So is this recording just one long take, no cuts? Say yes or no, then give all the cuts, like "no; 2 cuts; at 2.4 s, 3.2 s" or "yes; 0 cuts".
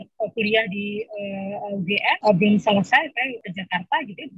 no; 2 cuts; at 2.2 s, 3.4 s